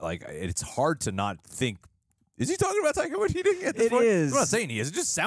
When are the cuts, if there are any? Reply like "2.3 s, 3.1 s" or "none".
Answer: none